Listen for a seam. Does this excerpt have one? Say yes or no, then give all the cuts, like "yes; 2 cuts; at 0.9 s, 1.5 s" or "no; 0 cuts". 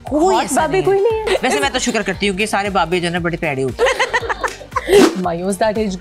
yes; 3 cuts; at 1.2 s, 3.8 s, 5.1 s